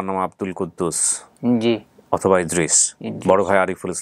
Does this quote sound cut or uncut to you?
uncut